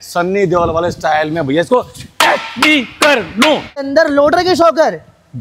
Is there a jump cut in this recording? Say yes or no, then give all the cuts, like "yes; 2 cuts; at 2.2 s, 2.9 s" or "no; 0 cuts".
yes; 1 cut; at 3.8 s